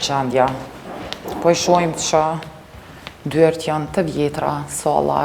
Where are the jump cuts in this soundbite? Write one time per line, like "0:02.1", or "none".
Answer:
none